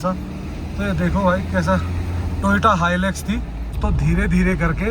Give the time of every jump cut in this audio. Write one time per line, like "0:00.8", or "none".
0:03.6